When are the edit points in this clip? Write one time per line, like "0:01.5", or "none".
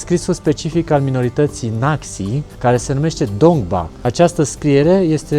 0:02.5

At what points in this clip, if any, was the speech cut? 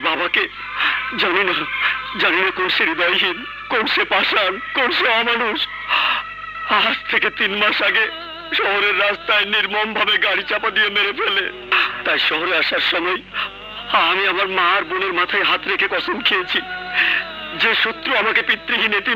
none

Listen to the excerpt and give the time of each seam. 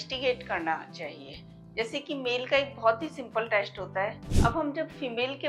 0:04.3

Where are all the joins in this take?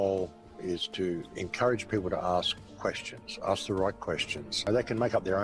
0:00.8
0:04.5

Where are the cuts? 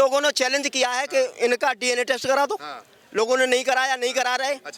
none

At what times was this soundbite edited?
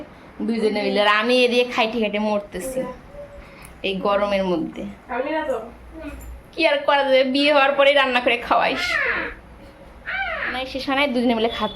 0:10.5

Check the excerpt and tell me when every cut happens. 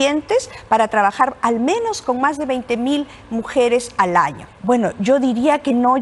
0:04.5

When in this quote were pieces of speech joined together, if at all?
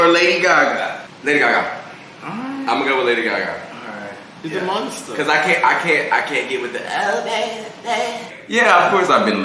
0:01.1
0:08.3

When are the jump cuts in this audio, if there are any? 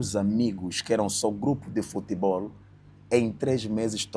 none

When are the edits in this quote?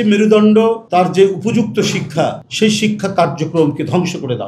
0:00.8
0:02.4

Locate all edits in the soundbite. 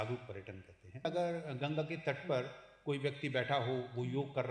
0:01.0

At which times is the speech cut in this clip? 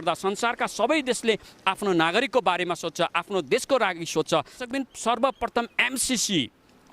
0:04.6

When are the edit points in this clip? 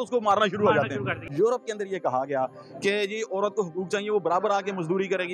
0:01.2

